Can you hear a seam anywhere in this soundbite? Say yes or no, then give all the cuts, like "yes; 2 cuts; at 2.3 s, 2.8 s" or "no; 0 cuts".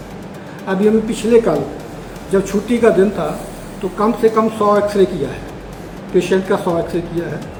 no; 0 cuts